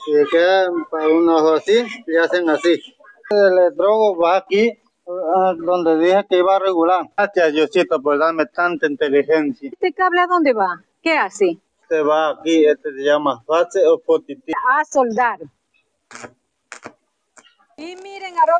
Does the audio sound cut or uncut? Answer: cut